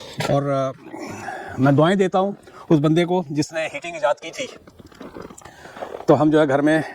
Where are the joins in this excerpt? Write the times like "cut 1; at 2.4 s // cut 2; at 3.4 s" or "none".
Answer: none